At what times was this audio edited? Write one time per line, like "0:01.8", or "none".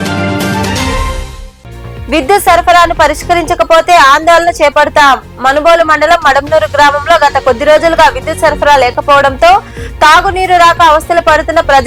none

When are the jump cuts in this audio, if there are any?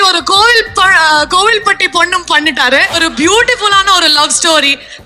0:02.9

